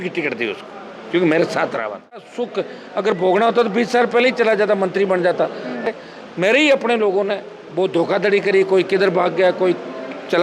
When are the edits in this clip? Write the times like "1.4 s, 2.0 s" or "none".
2.3 s, 5.9 s